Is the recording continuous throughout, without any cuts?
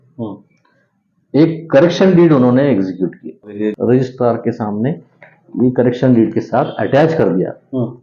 no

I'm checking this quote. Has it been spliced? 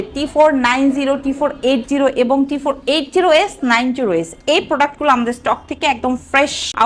no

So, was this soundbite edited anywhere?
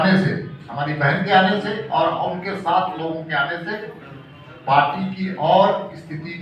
no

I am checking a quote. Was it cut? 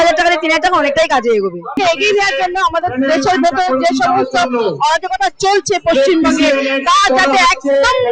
no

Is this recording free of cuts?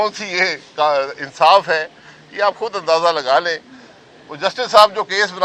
yes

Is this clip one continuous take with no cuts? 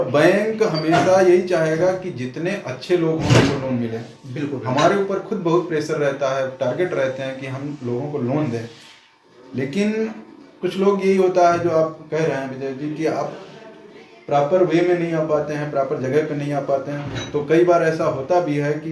yes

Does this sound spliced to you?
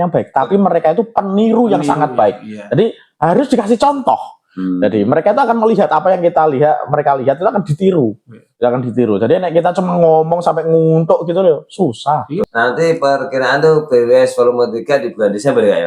yes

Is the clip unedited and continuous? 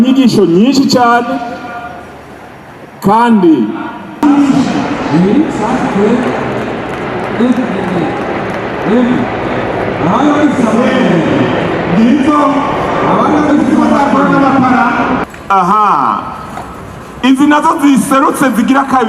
no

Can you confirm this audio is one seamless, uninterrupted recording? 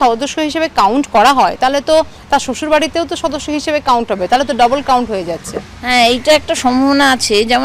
yes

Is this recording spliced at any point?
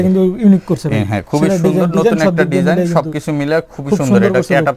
no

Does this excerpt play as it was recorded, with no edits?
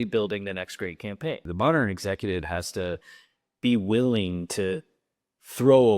no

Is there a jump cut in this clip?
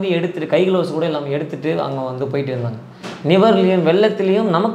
no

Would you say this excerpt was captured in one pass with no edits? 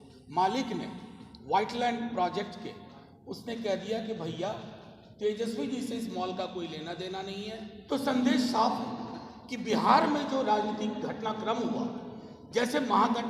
no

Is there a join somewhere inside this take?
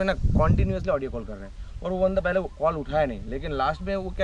no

